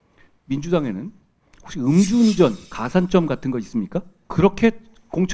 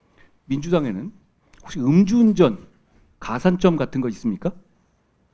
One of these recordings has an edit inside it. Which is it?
first; 2 cuts; at 2.7 s, 4.2 s

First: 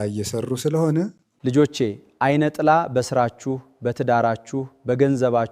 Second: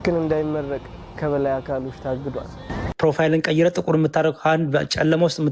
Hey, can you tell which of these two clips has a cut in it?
second; 1 cut; at 2.9 s

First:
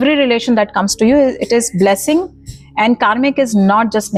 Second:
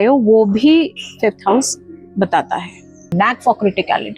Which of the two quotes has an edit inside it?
second; 1 cut; at 3.1 s

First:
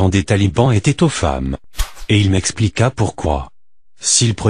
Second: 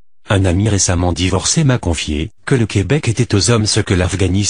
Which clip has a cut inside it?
first; 1 cut; at 3.6 s

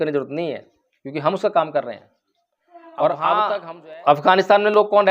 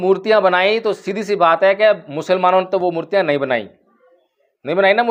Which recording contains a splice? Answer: first; 1 cut; at 3.5 s

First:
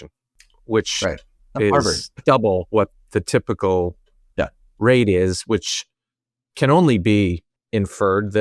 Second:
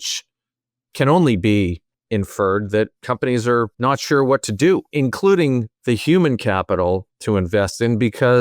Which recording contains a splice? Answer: second; 4 cuts; at 3.7 s, 4.9 s, 5.7 s, 7.1 s

